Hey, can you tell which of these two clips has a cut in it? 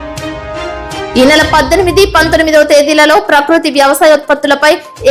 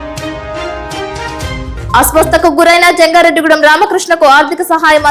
first; 1 cut; at 1.1 s

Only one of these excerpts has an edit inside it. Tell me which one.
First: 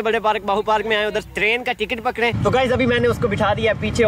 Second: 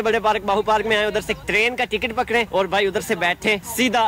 first; 2 cuts; at 1.3 s, 2.4 s

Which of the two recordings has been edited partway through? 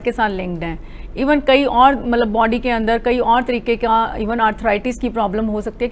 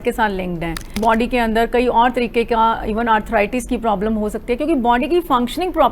second; 1 cut; at 1.0 s

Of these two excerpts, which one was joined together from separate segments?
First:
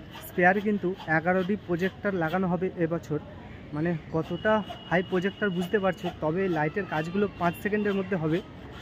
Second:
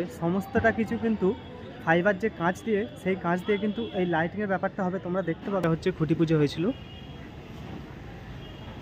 second; 1 cut; at 5.6 s

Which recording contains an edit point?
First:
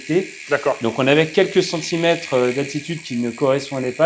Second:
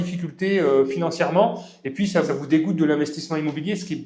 second; 1 cut; at 2.3 s

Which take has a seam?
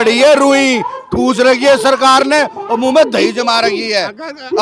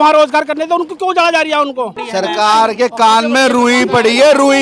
second; 1 cut; at 2.0 s

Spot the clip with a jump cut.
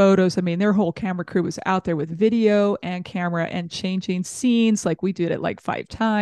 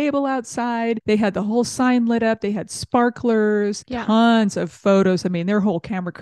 second; 2 cuts; at 1.0 s, 3.9 s

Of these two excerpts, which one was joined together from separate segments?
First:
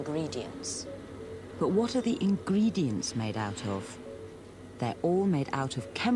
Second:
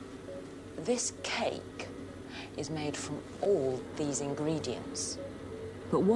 second; 1 cut; at 2.4 s

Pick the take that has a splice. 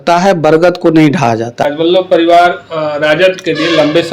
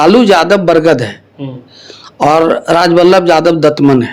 first; 1 cut; at 1.5 s

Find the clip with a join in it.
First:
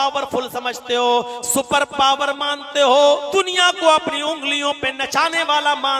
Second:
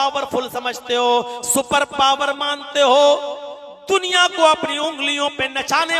first; 1 cut; at 3.3 s

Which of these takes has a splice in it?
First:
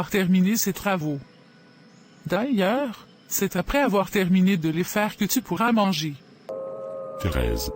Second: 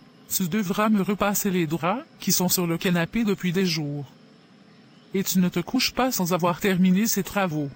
first; 1 cut; at 6.5 s

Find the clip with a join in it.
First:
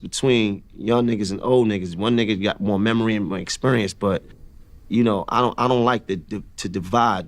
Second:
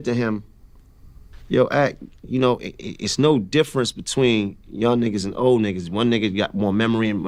first; 1 cut; at 5.3 s

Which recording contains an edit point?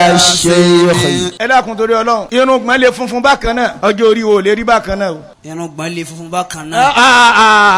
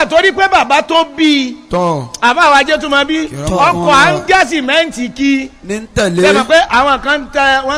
first; 4 cuts; at 1.3 s, 2.3 s, 3.8 s, 5.3 s

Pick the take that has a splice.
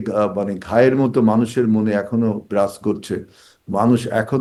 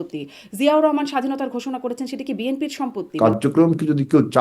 second; 1 cut; at 3.0 s

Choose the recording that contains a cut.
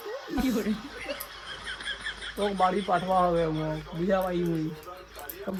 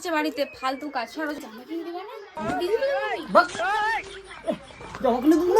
second; 1 cut; at 1.4 s

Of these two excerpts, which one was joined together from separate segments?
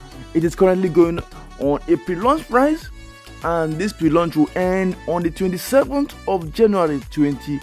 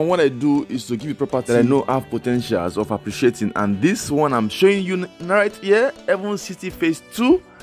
second; 1 cut; at 1.4 s

